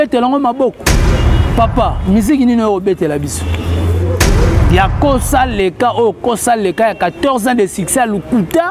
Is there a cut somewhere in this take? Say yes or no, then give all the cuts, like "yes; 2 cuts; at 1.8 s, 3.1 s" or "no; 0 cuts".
no; 0 cuts